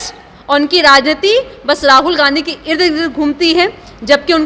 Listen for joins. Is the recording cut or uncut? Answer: uncut